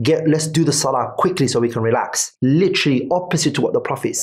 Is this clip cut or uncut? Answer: uncut